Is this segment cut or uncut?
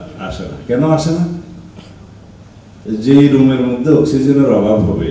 uncut